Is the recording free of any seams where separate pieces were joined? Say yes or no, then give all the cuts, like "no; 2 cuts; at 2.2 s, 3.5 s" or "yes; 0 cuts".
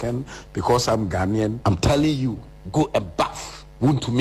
no; 1 cut; at 1.6 s